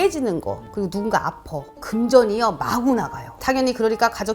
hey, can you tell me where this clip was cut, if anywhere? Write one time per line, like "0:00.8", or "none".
0:01.8
0:03.4